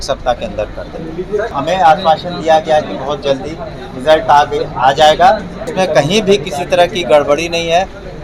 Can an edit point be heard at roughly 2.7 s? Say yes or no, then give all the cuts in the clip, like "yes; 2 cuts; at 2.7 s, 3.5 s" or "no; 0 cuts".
no; 2 cuts; at 1.5 s, 5.6 s